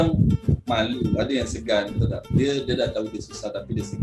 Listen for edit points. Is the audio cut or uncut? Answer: uncut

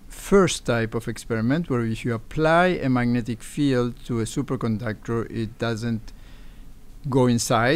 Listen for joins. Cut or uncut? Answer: uncut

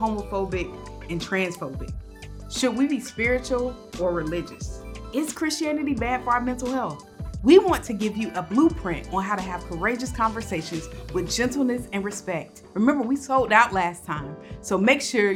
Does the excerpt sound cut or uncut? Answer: uncut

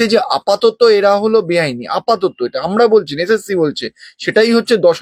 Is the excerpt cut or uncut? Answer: uncut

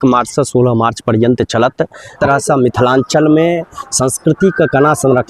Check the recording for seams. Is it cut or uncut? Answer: cut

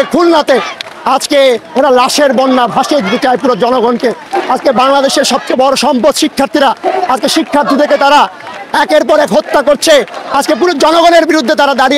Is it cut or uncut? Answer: uncut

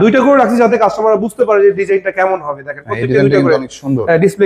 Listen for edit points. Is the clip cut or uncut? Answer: uncut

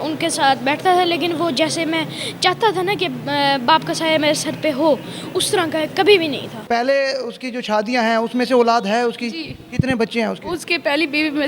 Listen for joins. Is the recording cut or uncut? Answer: cut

